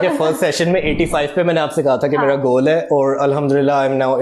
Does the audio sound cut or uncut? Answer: uncut